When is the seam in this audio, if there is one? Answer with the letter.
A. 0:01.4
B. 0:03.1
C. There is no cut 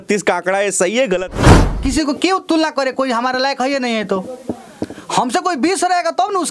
A